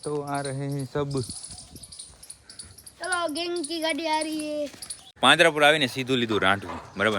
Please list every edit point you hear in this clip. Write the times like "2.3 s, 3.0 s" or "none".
5.2 s